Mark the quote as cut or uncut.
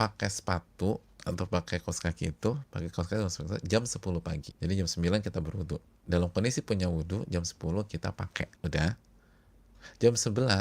cut